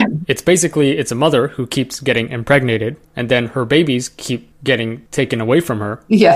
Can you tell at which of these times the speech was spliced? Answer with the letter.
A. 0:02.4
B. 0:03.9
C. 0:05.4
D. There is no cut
D